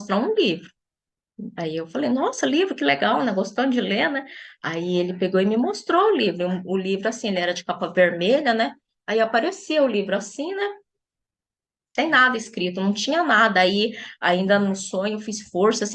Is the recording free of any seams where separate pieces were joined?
yes; 0 cuts

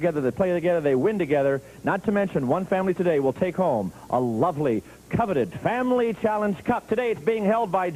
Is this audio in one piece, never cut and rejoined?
no; 1 cut; at 6.1 s

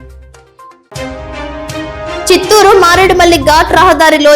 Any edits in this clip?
yes; 2 cuts; at 0.9 s, 2.3 s

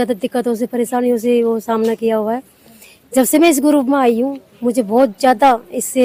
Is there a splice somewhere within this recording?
no; 0 cuts

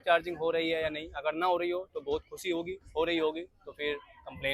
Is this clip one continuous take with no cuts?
yes; 0 cuts

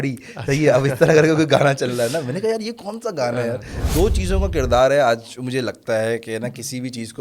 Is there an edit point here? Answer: yes; 1 cut; at 3.7 s

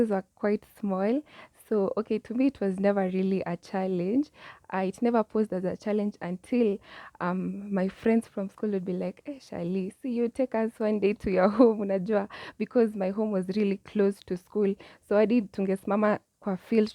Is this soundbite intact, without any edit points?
yes; 0 cuts

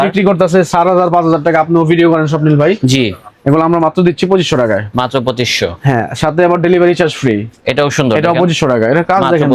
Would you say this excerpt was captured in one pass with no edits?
yes; 0 cuts

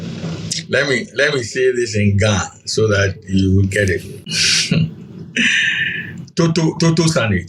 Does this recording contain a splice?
yes; 1 cut; at 4.2 s

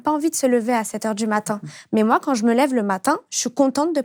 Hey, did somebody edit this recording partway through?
no; 0 cuts

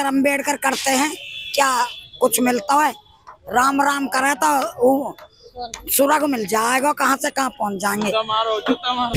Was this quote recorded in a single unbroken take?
yes; 0 cuts

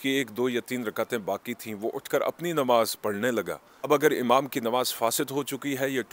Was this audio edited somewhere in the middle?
yes; 1 cut; at 3.9 s

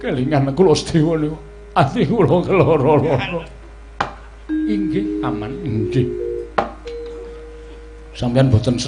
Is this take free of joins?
yes; 0 cuts

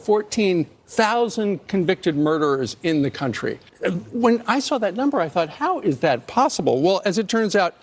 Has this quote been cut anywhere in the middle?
yes; 1 cut; at 3.7 s

